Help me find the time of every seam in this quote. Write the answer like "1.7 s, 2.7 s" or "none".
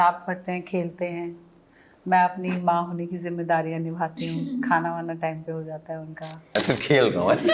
6.6 s